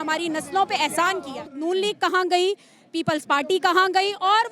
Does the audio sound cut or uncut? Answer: cut